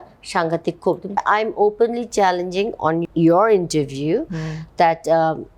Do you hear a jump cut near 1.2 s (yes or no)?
yes